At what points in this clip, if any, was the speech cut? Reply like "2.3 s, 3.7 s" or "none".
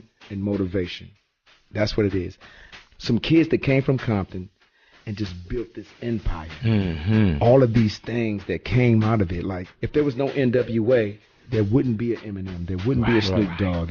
1.6 s